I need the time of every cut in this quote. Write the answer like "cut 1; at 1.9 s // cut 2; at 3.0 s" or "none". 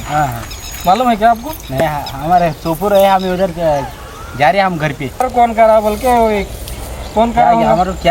cut 1; at 1.8 s // cut 2; at 5.2 s